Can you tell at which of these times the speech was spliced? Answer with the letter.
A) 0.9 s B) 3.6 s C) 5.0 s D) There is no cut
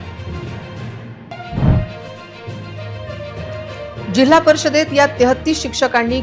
A